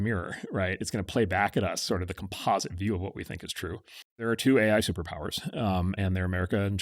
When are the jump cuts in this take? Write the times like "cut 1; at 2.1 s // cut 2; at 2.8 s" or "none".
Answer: cut 1; at 4.2 s